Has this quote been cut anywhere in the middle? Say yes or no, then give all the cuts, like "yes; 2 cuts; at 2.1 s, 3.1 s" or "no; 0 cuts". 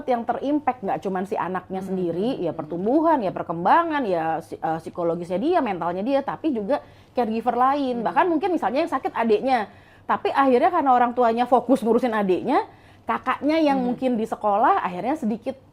no; 0 cuts